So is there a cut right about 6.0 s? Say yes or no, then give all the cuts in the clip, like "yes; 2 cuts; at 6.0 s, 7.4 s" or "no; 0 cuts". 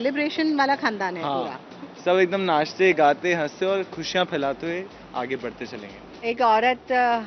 yes; 1 cut; at 6.0 s